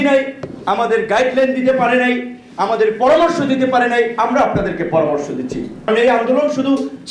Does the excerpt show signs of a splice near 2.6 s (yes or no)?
no